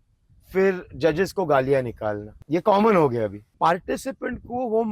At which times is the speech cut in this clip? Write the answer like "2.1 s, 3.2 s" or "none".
2.3 s, 3.4 s